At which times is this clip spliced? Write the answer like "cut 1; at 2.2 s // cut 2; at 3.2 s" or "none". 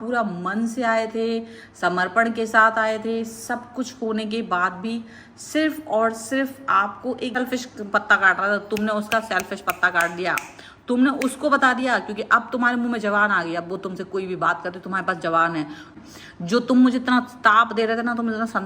cut 1; at 7.3 s // cut 2; at 15.9 s